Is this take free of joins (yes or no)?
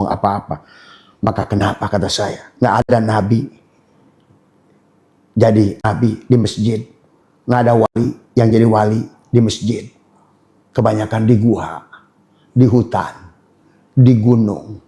yes